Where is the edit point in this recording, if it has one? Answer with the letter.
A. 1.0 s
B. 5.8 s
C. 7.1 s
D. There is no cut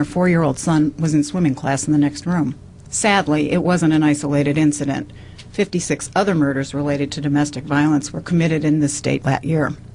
A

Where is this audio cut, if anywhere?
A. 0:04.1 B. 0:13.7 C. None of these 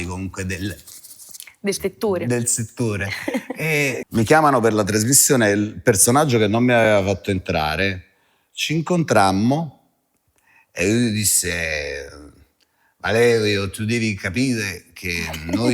A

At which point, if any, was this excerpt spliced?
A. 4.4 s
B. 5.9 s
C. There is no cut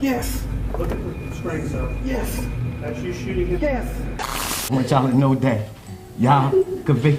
A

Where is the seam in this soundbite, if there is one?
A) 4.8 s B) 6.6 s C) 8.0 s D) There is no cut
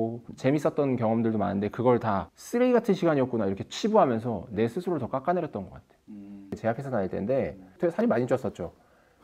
B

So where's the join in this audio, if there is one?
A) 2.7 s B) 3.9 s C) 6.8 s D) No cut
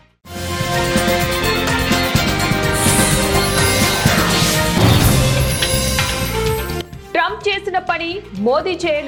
D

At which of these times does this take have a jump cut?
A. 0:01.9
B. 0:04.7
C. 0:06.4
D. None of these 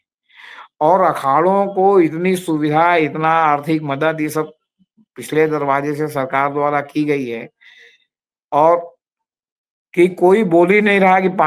D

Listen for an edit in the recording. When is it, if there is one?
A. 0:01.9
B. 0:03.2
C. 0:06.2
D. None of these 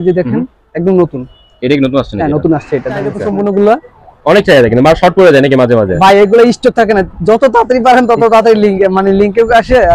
B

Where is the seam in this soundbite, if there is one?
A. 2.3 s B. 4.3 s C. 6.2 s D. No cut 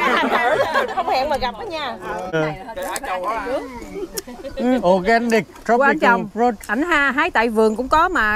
A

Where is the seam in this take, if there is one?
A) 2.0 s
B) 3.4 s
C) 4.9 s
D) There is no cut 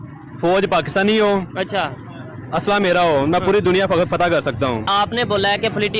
C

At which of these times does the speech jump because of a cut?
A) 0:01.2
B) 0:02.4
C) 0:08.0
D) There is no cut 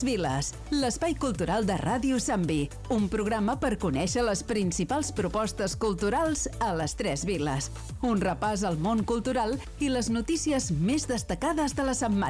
A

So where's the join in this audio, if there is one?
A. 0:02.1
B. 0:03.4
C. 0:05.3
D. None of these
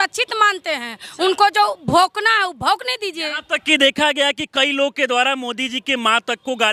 D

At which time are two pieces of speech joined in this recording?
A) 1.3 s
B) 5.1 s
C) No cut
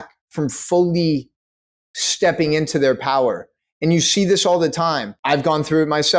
B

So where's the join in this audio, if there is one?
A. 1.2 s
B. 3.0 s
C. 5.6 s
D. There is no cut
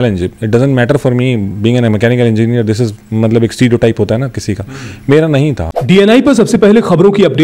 C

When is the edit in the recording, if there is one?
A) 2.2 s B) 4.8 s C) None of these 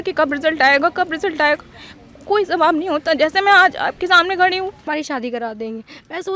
B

